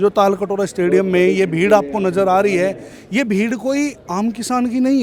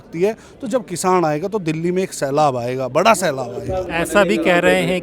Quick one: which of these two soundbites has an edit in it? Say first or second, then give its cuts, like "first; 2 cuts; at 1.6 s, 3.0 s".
second; 1 cut; at 3.9 s